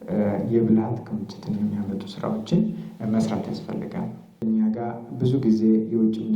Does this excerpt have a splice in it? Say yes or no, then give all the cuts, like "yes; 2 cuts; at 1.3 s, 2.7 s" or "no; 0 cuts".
yes; 1 cut; at 4.2 s